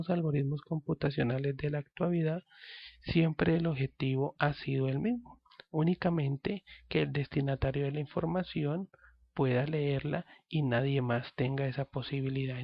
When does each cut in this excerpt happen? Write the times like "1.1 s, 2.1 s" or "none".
none